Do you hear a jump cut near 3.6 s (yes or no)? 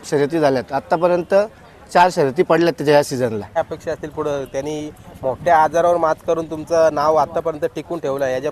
yes